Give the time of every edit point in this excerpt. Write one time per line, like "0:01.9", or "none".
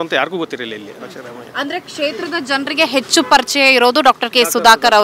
none